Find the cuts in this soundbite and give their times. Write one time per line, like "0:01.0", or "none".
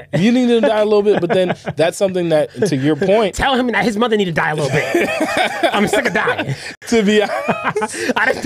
none